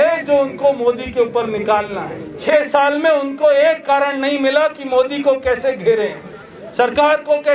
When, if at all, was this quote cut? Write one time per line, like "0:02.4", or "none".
0:02.4